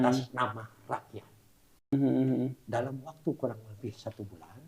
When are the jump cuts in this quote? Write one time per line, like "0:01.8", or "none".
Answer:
0:01.9